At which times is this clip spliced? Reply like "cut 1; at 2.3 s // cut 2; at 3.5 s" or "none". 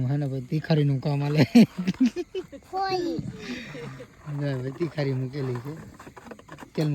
none